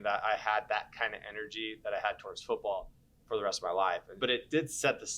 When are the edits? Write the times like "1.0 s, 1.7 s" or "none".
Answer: 4.1 s